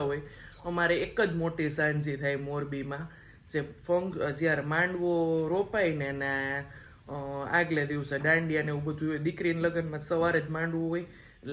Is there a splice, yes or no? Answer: no